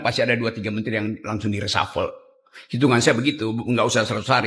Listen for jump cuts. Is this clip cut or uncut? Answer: uncut